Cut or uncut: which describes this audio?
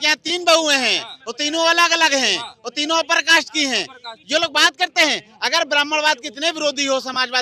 uncut